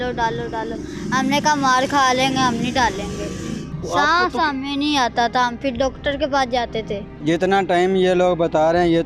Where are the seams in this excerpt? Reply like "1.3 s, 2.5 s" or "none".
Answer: 3.7 s, 7.2 s